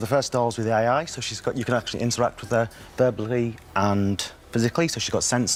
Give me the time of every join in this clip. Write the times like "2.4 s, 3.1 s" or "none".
none